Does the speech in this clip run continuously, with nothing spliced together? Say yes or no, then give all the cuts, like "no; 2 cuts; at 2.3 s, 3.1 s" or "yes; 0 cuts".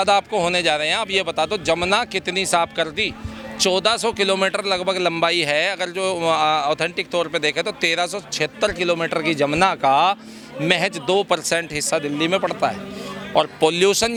yes; 0 cuts